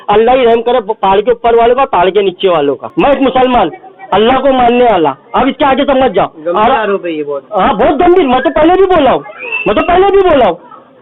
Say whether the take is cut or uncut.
cut